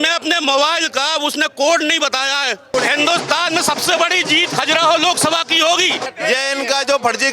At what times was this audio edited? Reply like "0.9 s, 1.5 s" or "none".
2.7 s, 6.1 s